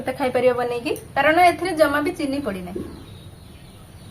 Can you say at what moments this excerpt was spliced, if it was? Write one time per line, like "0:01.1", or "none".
0:03.0